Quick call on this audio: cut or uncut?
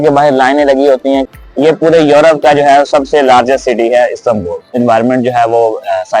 cut